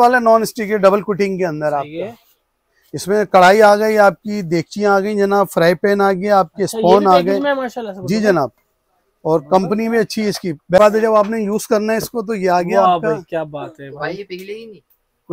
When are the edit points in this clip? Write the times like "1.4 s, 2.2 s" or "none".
10.8 s

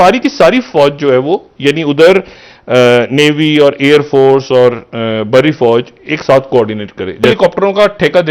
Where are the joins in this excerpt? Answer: 7.3 s

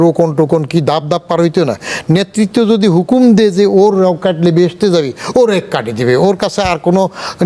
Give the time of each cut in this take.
none

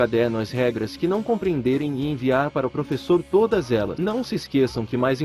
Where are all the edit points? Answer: 4.0 s

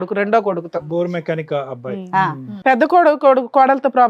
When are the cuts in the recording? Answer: 2.5 s

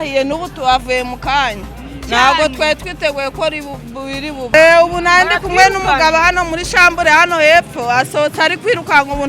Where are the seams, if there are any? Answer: 4.5 s

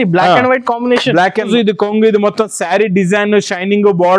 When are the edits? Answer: 1.5 s

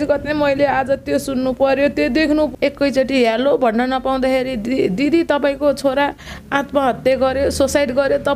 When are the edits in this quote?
2.5 s

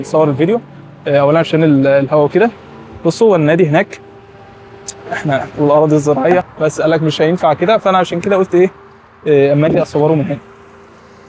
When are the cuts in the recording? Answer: 6.5 s

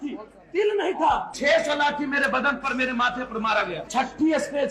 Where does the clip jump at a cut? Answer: 1.3 s, 3.9 s

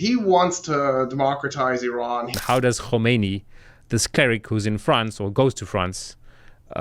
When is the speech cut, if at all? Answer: 2.3 s

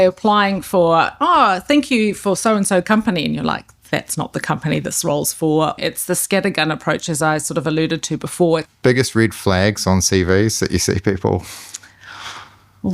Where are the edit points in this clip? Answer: 5.8 s, 8.6 s

